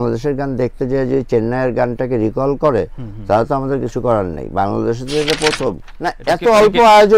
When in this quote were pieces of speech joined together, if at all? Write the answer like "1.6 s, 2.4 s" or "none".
5.9 s